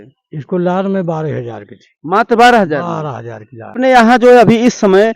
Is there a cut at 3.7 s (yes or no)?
yes